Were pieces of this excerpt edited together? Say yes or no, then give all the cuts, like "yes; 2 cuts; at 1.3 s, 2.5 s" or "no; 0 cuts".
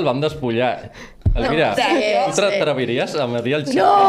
no; 0 cuts